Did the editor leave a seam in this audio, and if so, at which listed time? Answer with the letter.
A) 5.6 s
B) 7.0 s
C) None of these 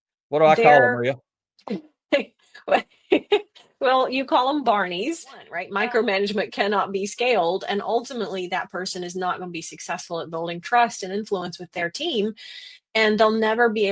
A